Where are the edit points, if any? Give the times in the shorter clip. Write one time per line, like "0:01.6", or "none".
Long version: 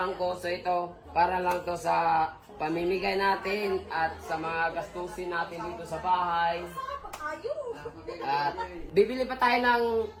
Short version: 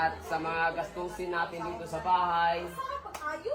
none